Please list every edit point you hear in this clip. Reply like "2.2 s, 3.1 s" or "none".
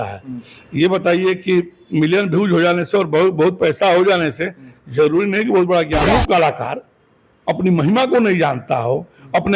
6.0 s